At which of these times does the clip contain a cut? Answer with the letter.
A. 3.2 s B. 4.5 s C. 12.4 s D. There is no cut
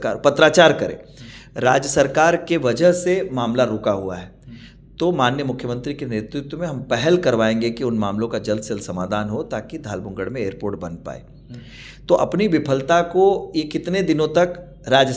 D